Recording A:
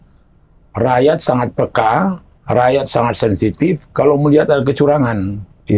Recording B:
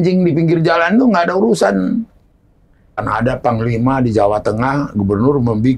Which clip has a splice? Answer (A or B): B